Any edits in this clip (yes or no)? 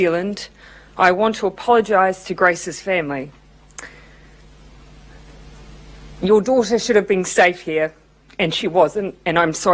no